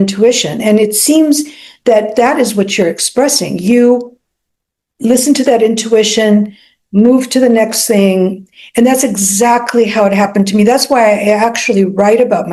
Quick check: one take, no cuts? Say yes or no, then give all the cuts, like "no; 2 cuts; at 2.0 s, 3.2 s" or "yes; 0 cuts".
yes; 0 cuts